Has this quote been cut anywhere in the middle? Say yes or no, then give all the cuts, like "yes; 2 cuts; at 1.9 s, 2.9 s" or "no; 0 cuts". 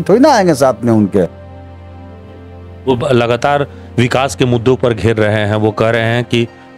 no; 0 cuts